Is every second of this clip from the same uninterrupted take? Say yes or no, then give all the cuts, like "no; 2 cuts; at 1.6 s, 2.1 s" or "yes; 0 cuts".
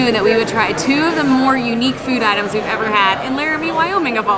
yes; 0 cuts